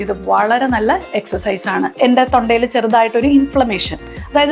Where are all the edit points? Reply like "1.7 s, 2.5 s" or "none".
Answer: 1.9 s